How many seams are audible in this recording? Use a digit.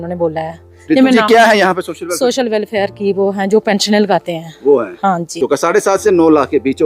1